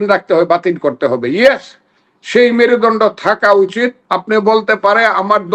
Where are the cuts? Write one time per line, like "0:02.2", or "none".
0:04.0